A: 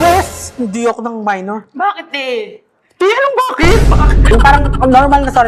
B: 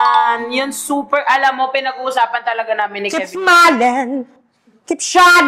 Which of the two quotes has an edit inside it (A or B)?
A